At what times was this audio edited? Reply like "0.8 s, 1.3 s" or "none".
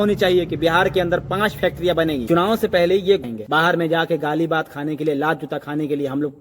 3.2 s